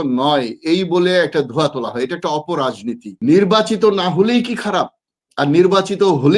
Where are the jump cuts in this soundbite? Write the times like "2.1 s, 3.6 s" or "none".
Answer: 3.1 s